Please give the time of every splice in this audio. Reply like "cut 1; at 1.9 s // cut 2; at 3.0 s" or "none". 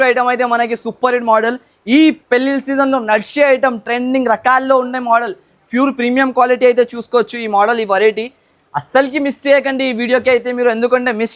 none